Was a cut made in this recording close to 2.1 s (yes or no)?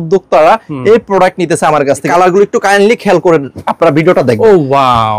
yes